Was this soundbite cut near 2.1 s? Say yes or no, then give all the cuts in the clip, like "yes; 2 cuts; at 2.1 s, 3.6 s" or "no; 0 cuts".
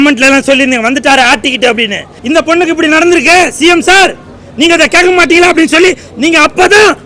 yes; 1 cut; at 2.1 s